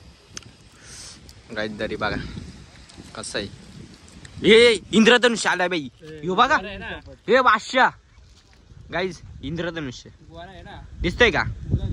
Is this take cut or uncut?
uncut